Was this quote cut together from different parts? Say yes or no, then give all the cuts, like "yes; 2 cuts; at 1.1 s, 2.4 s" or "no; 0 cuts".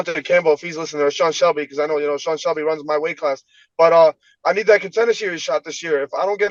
no; 0 cuts